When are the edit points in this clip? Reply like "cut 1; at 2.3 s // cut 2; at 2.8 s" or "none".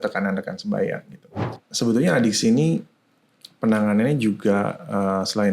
cut 1; at 1.6 s